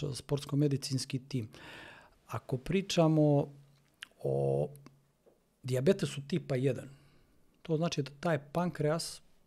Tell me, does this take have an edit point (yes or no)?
no